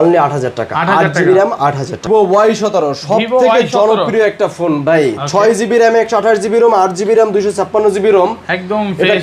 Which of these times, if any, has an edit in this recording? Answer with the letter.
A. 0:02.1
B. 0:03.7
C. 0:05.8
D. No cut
A